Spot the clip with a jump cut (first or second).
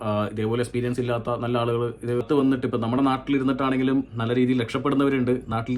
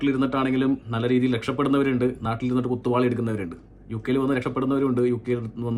first